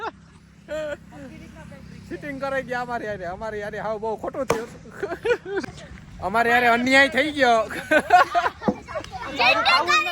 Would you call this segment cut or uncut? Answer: cut